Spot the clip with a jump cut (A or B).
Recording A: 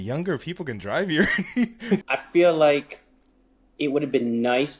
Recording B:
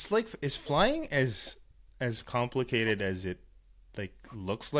A